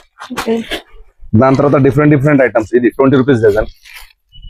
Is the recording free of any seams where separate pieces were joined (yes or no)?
yes